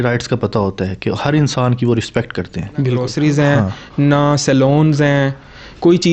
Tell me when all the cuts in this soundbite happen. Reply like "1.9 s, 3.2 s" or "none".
3.1 s